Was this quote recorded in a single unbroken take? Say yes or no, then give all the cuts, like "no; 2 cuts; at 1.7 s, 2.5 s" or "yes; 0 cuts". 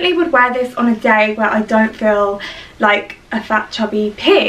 yes; 0 cuts